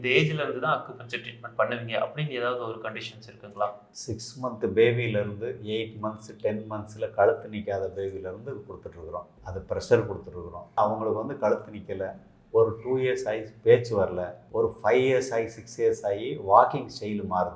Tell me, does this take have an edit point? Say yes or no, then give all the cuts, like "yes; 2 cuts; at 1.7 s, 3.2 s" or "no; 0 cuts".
no; 0 cuts